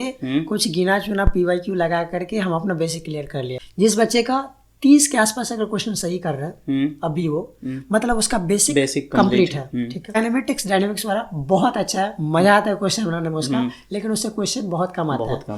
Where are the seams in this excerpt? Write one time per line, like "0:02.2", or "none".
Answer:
0:03.6
0:10.2